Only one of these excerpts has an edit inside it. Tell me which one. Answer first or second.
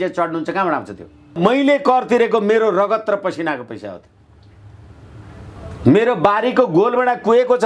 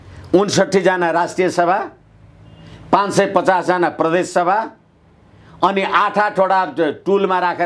first